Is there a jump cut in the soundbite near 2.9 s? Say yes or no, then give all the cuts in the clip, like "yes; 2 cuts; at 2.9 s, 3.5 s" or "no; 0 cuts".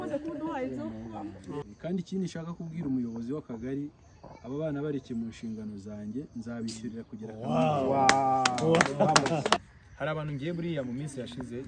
no; 2 cuts; at 1.6 s, 9.6 s